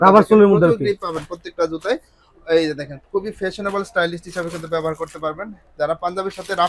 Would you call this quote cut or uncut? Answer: uncut